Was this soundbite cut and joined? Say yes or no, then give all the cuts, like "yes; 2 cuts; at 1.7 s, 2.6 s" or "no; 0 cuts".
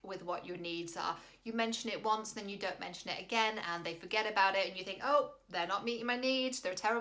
no; 0 cuts